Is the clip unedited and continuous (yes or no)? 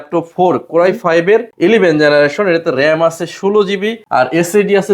no